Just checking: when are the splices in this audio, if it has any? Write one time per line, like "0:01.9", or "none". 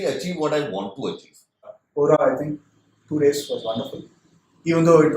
0:01.7